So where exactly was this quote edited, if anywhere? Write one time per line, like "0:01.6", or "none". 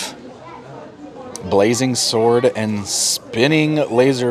none